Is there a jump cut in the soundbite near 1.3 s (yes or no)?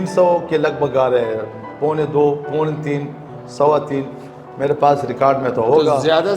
no